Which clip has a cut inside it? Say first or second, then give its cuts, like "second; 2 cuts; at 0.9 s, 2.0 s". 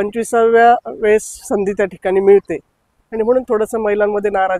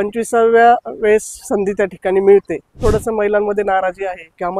second; 1 cut; at 2.8 s